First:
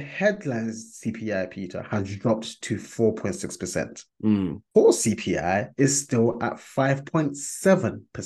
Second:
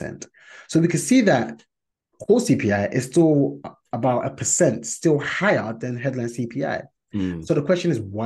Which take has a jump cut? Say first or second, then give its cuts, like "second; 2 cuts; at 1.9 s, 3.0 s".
first; 1 cut; at 4.6 s